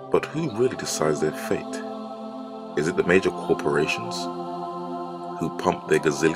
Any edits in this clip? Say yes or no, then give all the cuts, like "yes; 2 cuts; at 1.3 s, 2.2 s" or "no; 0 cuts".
yes; 1 cut; at 3.0 s